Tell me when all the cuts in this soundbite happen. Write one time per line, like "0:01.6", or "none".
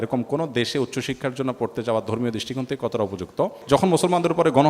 0:03.6